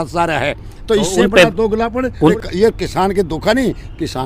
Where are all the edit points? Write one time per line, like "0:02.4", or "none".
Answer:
0:02.3